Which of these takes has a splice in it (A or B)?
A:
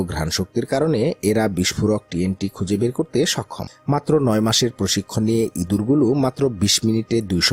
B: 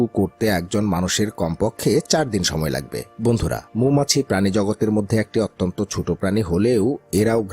B